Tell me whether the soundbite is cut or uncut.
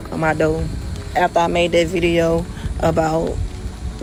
uncut